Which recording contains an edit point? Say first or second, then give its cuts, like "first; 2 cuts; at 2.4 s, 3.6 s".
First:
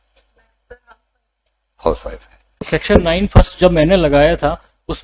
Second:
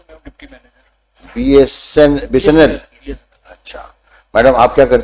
first; 1 cut; at 2.6 s